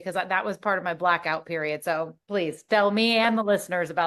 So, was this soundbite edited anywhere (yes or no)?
no